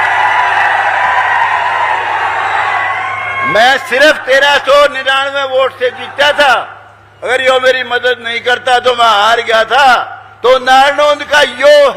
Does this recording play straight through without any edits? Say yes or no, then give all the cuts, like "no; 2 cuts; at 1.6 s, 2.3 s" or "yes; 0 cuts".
yes; 0 cuts